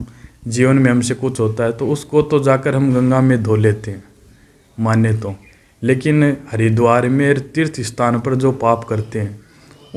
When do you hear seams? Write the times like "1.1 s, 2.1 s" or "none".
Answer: none